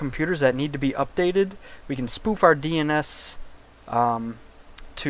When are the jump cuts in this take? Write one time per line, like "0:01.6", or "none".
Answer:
0:02.9